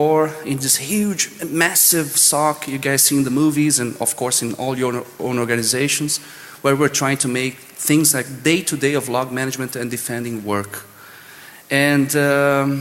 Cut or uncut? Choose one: cut